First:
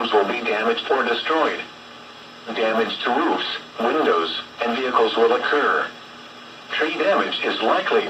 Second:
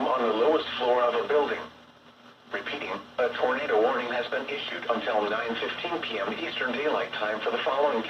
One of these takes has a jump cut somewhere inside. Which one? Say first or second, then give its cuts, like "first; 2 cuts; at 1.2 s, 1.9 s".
second; 1 cut; at 1.0 s